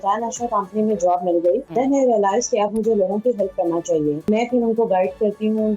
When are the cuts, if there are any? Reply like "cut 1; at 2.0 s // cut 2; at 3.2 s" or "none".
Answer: cut 1; at 1.7 s // cut 2; at 4.2 s